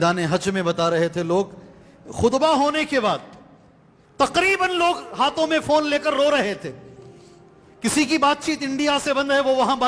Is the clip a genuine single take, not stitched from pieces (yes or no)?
yes